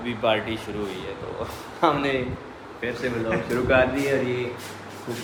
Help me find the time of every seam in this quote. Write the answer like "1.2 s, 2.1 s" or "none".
none